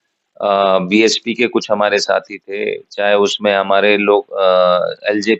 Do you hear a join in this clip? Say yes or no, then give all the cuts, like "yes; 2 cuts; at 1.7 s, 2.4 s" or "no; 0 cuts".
no; 0 cuts